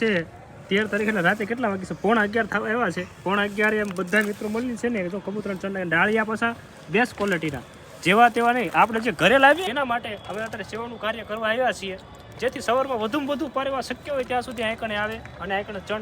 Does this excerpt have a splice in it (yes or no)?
yes